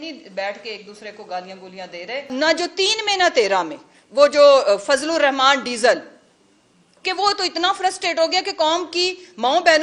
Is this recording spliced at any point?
yes; 1 cut; at 2.3 s

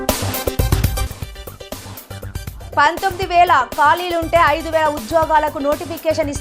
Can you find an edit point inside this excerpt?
yes; 2 cuts; at 1.1 s, 2.5 s

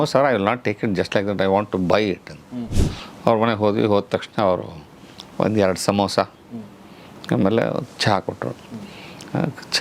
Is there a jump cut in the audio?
yes; 1 cut; at 2.5 s

